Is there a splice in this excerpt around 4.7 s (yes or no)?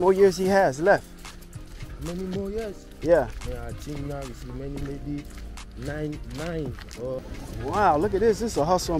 no